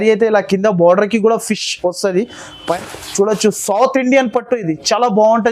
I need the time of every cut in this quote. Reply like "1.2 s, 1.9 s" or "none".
2.8 s